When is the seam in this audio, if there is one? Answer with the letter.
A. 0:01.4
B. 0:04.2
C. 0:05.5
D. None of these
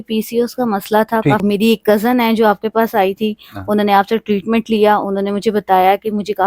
A